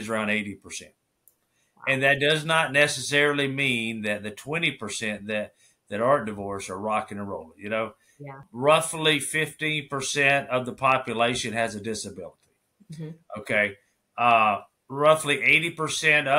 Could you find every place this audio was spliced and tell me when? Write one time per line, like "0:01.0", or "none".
0:08.4